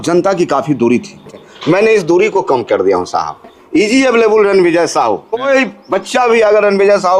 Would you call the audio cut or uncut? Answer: cut